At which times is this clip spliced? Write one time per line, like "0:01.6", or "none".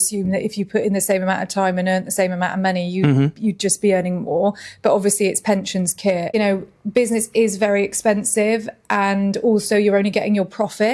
0:06.3

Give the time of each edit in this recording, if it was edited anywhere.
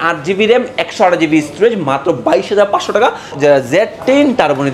0:03.3

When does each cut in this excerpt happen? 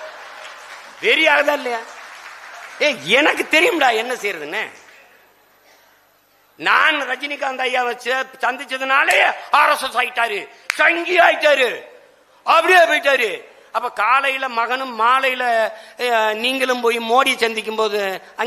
none

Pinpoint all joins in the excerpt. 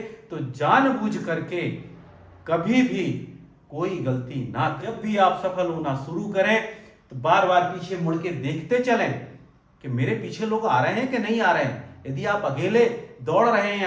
0:04.8

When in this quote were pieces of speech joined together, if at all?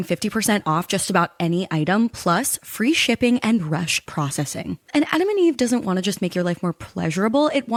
none

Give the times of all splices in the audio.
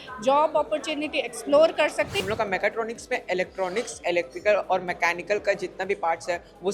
0:02.2

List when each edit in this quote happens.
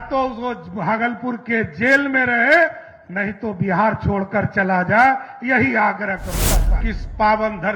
0:06.7

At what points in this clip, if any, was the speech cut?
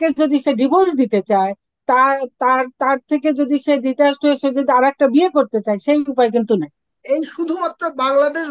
0:06.9

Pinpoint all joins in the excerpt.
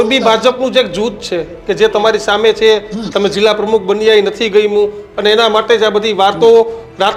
none

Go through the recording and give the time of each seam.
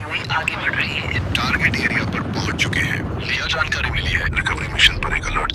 0:03.4

